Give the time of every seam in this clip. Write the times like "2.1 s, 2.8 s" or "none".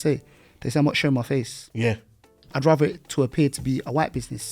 2.4 s